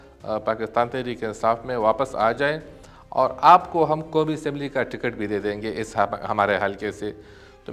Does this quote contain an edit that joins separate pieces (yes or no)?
no